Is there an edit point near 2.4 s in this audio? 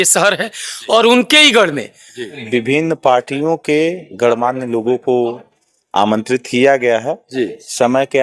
yes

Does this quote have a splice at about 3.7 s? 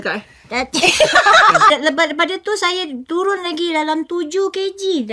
no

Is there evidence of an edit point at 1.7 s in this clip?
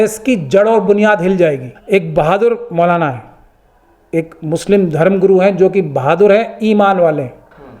yes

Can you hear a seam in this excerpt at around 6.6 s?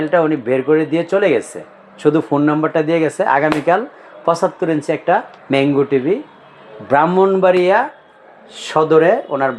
no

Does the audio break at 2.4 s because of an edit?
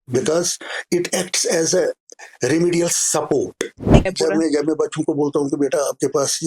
no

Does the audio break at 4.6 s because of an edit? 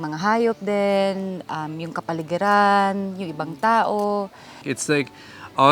yes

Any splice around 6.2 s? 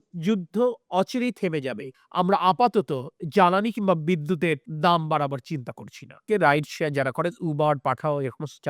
yes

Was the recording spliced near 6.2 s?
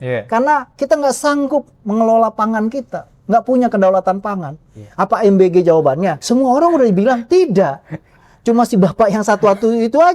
yes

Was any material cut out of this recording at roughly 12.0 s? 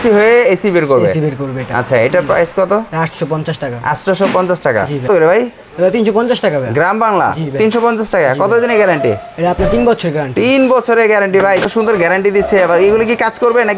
yes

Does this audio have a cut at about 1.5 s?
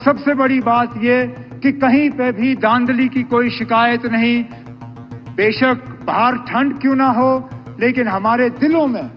no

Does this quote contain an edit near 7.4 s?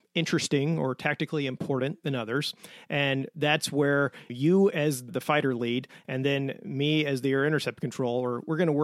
no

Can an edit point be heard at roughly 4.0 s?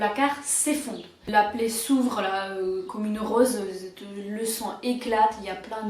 no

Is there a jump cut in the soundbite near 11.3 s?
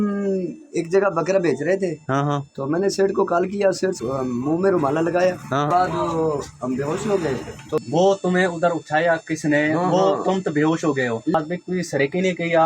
yes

